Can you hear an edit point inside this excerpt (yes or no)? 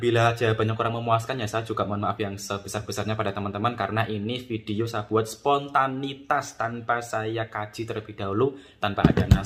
no